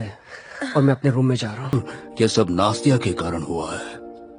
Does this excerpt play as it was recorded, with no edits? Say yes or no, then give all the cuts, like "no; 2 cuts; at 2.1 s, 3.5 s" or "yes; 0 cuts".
no; 1 cut; at 1.7 s